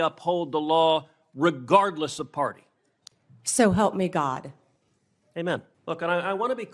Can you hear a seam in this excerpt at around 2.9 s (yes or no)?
no